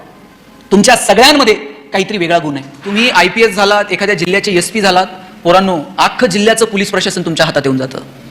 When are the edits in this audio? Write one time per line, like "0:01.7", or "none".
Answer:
0:02.9